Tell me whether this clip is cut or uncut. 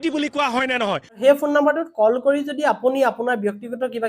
cut